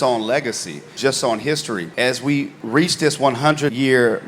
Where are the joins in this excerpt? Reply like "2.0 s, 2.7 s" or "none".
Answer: 0.9 s, 1.9 s